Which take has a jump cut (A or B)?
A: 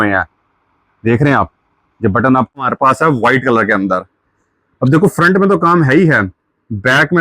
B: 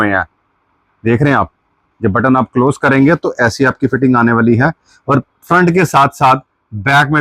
A